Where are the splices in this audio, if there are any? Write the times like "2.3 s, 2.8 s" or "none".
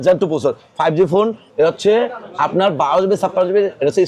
1.4 s